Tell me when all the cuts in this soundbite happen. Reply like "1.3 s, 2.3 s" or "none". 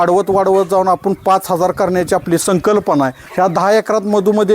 3.2 s

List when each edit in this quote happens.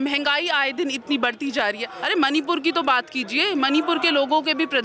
1.9 s

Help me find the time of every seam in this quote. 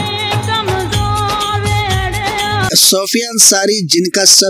2.7 s

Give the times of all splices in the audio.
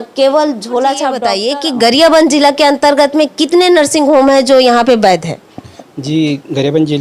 1.4 s

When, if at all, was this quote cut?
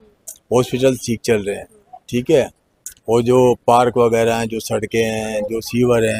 none

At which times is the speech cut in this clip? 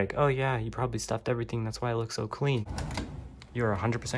2.7 s

